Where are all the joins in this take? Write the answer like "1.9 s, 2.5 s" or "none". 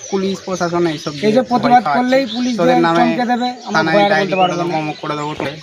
none